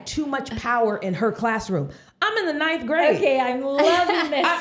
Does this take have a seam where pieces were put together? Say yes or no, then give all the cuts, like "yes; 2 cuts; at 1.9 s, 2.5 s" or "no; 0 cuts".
no; 0 cuts